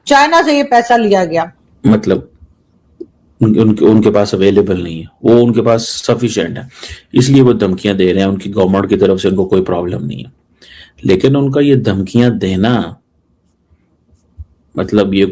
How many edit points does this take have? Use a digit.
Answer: 1